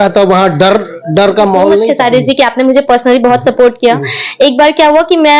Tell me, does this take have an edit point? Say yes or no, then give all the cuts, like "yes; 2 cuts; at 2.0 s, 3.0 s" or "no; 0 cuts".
yes; 1 cut; at 1.9 s